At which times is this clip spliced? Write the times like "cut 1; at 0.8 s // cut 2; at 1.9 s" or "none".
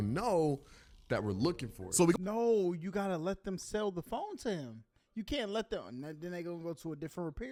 none